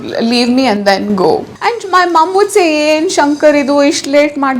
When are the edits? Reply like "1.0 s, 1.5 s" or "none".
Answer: 1.5 s